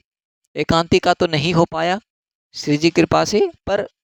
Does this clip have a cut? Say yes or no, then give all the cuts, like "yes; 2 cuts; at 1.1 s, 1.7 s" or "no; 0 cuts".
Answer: no; 0 cuts